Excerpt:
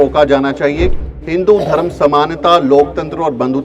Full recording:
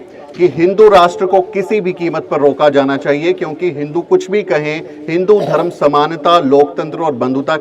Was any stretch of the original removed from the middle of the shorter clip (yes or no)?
yes